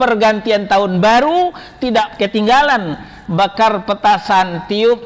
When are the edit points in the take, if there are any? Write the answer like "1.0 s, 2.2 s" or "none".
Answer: 2.1 s